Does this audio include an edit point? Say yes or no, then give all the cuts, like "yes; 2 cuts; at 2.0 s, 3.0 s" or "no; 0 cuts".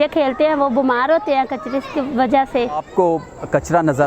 yes; 1 cut; at 2.8 s